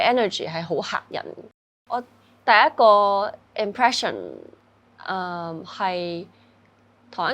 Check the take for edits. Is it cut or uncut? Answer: cut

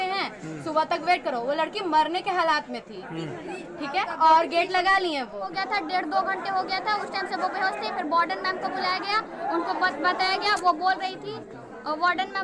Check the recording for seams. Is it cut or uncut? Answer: cut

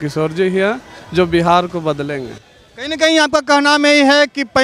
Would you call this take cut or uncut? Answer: uncut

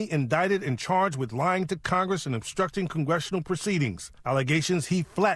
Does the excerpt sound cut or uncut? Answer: uncut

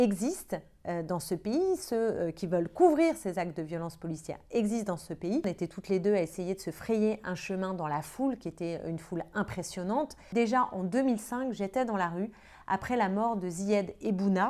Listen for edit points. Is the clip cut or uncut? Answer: cut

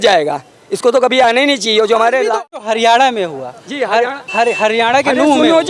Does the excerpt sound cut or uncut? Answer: cut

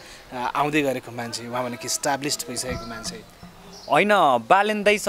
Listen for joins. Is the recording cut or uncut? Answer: uncut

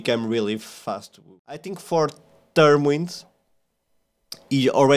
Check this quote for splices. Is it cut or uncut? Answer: cut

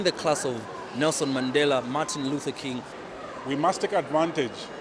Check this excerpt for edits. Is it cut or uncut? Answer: uncut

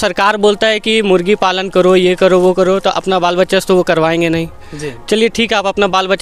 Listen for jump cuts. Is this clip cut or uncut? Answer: uncut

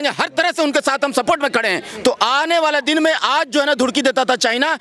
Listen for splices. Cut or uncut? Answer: cut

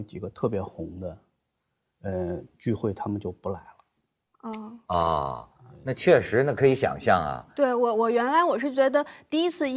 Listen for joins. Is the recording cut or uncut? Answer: uncut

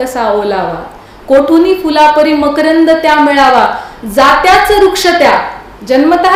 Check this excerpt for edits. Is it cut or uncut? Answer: uncut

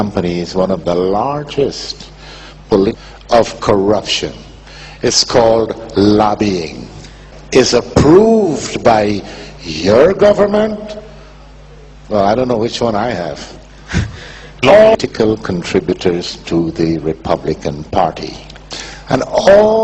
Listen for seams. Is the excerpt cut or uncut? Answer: uncut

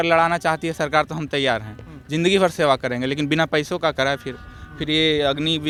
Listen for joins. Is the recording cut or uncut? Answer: uncut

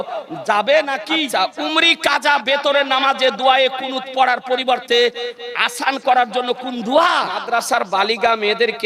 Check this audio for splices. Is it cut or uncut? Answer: cut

